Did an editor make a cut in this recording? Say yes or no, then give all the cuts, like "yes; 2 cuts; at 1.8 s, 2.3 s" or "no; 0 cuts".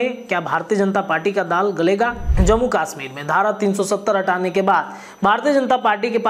yes; 1 cut; at 2.2 s